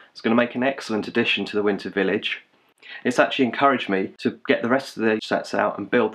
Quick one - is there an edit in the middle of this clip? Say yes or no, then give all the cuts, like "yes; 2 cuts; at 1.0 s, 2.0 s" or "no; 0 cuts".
yes; 2 cuts; at 4.1 s, 5.2 s